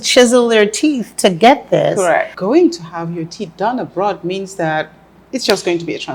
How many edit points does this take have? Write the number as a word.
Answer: one